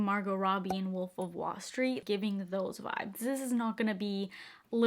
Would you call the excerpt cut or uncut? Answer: cut